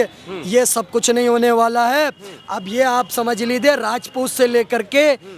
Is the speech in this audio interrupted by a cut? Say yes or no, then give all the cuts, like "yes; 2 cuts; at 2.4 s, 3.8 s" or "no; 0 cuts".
no; 0 cuts